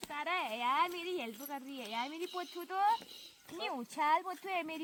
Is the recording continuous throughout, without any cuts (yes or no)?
yes